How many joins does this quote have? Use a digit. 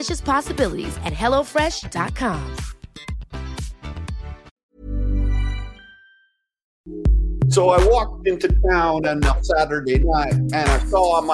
2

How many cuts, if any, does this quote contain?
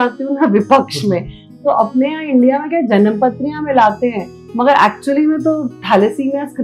1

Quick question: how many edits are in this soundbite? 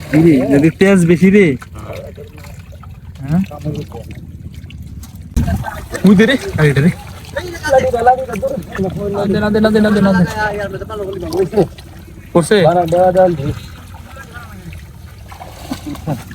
1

